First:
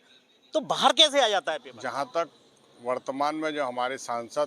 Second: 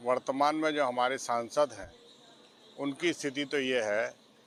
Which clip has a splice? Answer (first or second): first